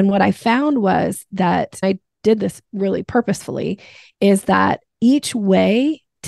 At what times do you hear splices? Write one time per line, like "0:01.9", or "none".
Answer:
0:01.8
0:03.1